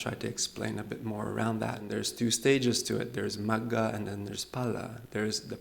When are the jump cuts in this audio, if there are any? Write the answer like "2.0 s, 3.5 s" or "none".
1.9 s